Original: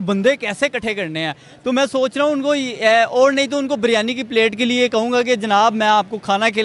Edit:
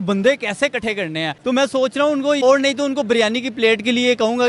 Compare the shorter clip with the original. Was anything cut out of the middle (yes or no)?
yes